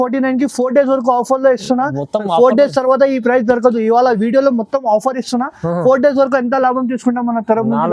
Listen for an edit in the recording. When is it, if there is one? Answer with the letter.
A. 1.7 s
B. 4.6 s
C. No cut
C